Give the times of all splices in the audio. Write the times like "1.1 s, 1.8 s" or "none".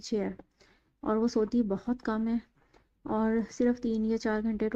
none

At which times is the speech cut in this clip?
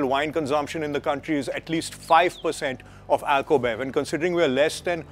none

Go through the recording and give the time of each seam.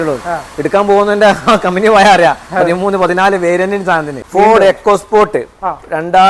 4.1 s

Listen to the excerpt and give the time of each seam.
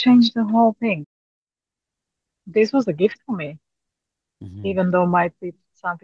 1.1 s

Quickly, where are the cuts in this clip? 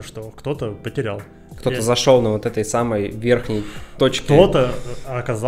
none

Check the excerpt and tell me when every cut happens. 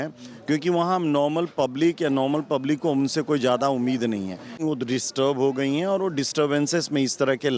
4.6 s

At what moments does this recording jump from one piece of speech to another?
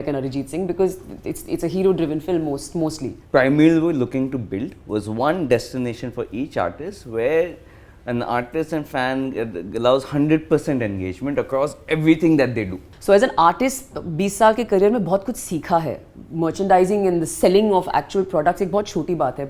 3.1 s, 12.7 s

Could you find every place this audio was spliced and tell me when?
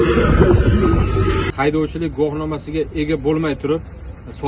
1.5 s

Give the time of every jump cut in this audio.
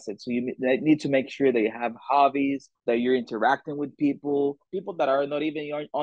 2.7 s, 4.7 s

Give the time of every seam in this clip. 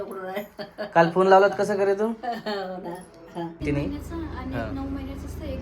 3.6 s

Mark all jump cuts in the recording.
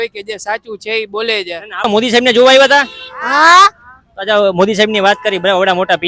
1.7 s

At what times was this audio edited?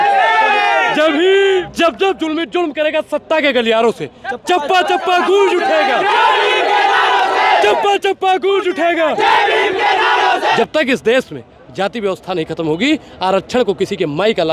1.6 s, 10.6 s

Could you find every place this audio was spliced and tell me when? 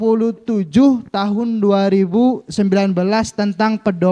none

